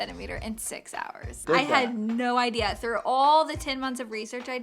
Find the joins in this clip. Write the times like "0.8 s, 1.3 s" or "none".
1.4 s